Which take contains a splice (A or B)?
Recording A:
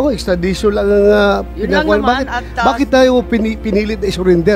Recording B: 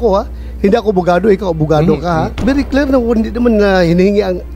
B